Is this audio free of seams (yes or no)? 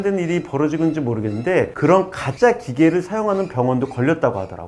yes